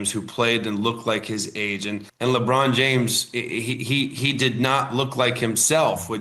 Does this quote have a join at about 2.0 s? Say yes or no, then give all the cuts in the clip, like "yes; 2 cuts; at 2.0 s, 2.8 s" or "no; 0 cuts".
yes; 1 cut; at 2.0 s